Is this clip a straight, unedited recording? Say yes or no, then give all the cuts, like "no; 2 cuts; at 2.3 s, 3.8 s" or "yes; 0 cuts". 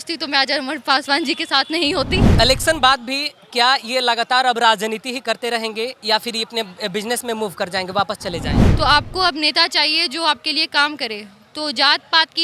no; 2 cuts; at 2.3 s, 8.6 s